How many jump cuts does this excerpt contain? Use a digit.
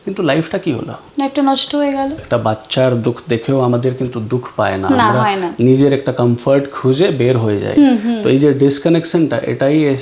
2